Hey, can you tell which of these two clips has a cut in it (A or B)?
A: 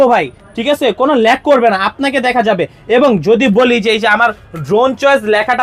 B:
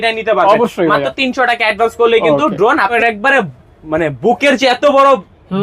B